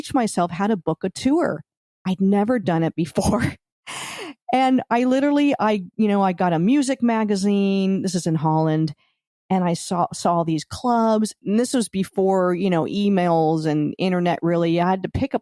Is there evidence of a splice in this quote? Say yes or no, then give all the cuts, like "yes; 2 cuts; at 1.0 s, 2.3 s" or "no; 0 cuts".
yes; 1 cut; at 11.3 s